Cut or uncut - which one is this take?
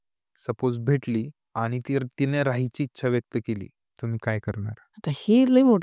cut